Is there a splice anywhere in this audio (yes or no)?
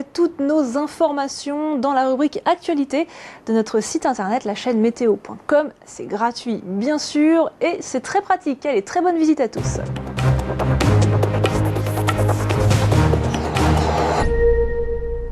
no